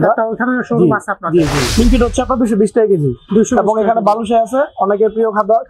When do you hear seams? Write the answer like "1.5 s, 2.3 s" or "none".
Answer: 1.6 s